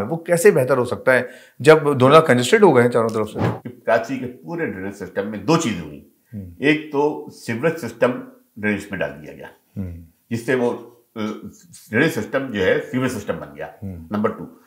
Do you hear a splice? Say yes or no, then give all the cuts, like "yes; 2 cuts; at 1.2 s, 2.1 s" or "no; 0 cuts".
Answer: yes; 1 cut; at 3.4 s